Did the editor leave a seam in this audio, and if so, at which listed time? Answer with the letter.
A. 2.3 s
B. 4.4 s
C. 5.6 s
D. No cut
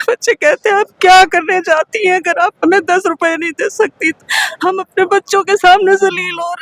D